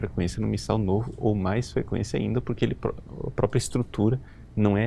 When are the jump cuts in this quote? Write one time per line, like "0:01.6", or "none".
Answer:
none